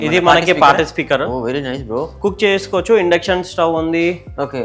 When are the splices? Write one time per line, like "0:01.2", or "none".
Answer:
0:02.1